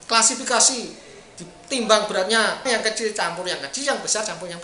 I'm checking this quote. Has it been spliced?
yes; 1 cut; at 2.6 s

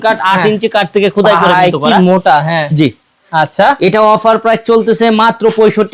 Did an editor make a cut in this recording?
no; 0 cuts

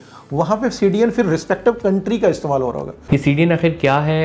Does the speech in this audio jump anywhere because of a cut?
yes; 1 cut; at 2.9 s

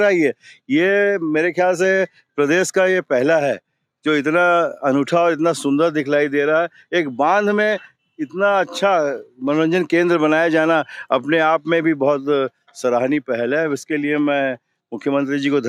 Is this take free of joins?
yes; 0 cuts

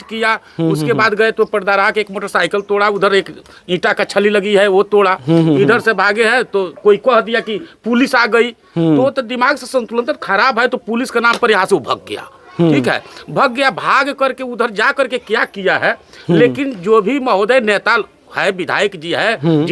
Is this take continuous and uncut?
yes; 0 cuts

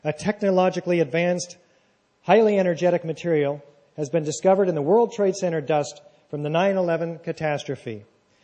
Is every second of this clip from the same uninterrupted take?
no; 1 cut; at 5.1 s

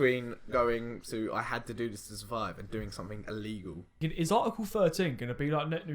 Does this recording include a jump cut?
yes; 1 cut; at 4.1 s

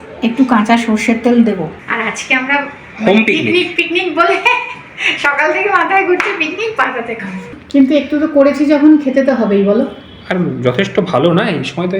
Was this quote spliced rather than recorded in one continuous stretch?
yes; 2 cuts; at 1.8 s, 7.5 s

